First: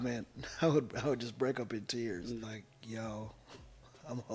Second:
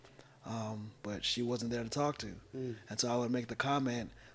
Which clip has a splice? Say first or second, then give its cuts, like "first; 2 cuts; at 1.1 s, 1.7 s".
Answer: first; 1 cut; at 2.4 s